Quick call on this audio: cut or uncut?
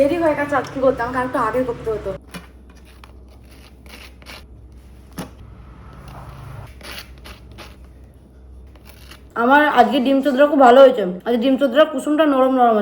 uncut